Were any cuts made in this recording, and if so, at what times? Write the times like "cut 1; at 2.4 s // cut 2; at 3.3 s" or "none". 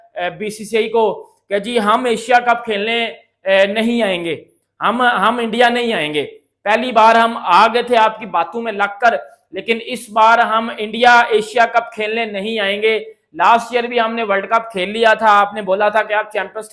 none